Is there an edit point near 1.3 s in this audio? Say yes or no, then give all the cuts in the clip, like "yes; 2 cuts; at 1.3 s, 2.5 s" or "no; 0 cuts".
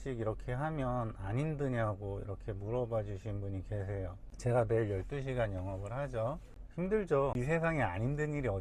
no; 3 cuts; at 4.2 s, 6.6 s, 7.4 s